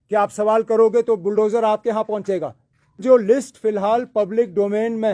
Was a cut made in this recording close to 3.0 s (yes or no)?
yes